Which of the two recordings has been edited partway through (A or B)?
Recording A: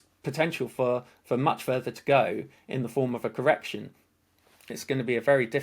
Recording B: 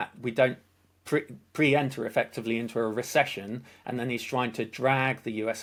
A